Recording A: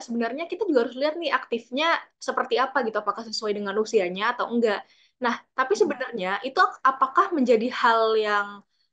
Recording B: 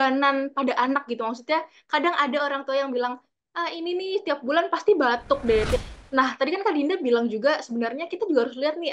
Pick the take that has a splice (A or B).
B